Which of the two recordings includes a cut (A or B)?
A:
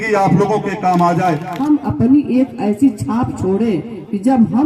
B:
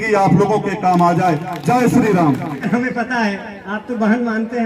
A